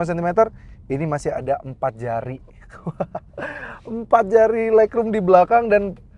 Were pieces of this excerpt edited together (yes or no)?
no